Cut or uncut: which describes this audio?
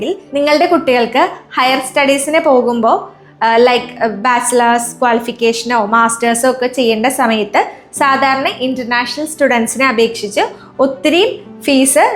uncut